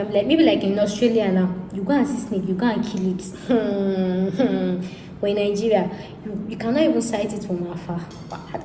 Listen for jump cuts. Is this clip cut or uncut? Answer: uncut